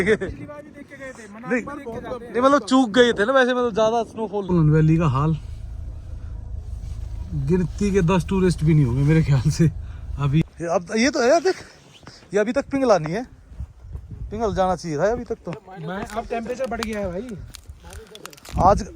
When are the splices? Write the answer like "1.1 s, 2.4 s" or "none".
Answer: 4.5 s, 10.4 s